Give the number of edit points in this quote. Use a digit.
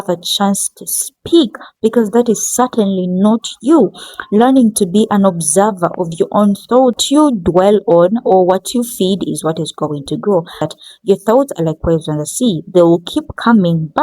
2